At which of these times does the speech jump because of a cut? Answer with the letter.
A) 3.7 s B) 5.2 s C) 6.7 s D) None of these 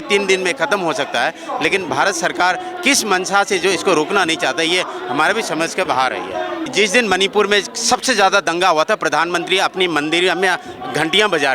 C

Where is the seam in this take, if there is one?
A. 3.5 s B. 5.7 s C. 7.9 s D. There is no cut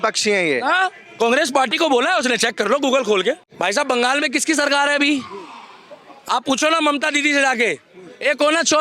A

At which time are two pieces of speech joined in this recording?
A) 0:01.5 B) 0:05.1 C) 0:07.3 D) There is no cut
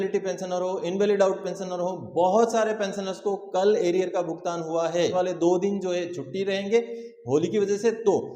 B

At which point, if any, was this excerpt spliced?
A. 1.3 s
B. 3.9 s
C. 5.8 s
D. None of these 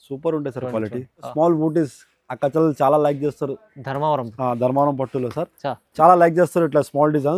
A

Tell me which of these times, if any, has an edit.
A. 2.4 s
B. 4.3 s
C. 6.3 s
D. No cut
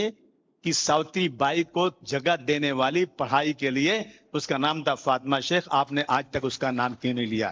D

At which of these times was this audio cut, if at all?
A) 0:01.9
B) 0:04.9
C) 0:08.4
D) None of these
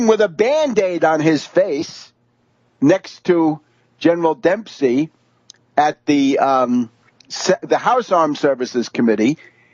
C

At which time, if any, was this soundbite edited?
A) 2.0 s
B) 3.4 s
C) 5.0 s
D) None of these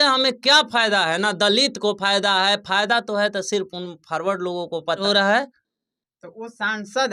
C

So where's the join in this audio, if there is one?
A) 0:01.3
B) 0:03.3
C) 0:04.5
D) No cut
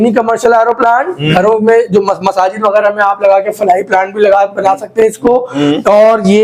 D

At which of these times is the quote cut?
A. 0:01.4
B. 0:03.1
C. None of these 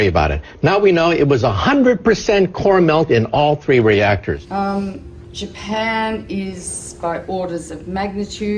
A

